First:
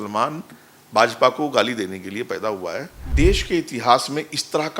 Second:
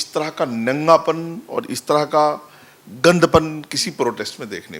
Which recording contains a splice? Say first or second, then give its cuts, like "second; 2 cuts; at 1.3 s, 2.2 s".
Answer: first; 1 cut; at 3.0 s